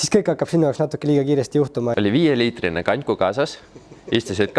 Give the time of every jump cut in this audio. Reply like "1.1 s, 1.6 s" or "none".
1.9 s